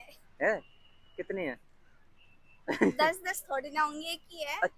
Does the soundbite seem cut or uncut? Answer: uncut